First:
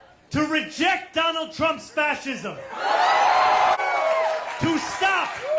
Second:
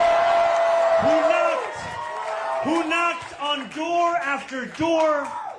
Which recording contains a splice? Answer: first; 1 cut; at 3.8 s

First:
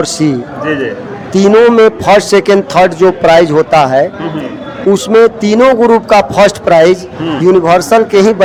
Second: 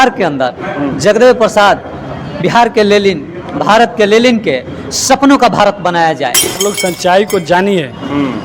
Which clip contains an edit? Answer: second; 1 cut; at 6.6 s

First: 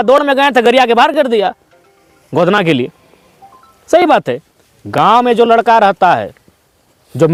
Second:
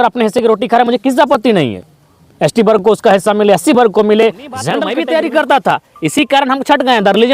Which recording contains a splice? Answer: second; 1 cut; at 4.8 s

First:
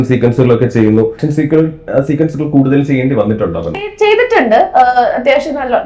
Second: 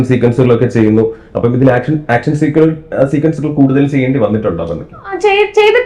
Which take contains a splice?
first; 2 cuts; at 1.2 s, 3.9 s

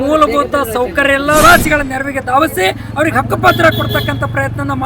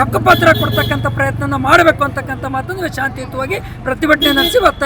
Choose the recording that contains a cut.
first; 1 cut; at 1.4 s

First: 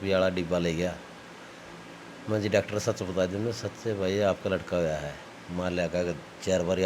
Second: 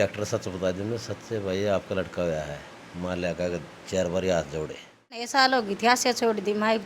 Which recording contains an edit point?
second; 1 cut; at 5.3 s

